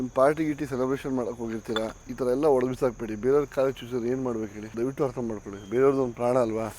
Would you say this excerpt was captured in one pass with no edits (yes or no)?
no